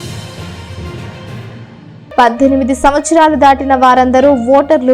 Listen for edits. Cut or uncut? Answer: cut